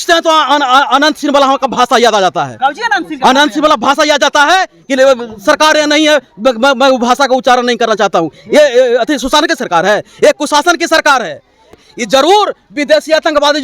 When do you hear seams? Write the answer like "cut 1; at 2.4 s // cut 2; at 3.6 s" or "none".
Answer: cut 1; at 11.7 s